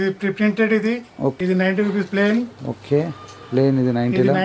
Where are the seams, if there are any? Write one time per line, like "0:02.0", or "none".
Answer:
0:01.4